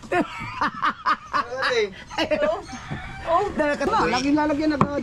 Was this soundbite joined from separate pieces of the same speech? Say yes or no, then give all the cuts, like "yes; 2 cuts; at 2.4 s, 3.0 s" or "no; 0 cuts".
yes; 1 cut; at 3.9 s